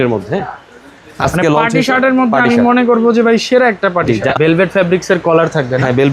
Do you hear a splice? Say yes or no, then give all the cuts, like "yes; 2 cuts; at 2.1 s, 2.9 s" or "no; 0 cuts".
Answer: yes; 1 cut; at 4.3 s